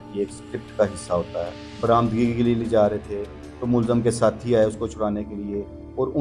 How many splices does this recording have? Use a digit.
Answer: 1